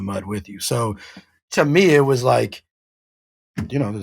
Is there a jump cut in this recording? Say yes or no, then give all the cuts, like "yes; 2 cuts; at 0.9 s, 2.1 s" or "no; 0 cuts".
no; 0 cuts